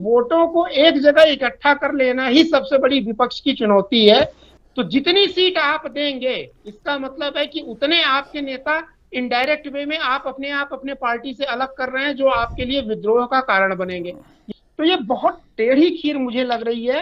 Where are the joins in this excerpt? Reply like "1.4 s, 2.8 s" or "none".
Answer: 4.5 s, 14.3 s